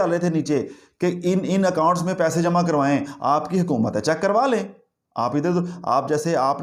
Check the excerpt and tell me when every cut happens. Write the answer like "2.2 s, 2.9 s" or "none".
none